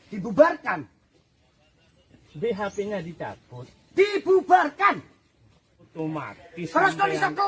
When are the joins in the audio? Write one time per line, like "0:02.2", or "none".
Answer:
0:05.9